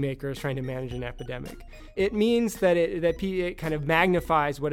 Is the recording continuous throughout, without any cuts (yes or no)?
no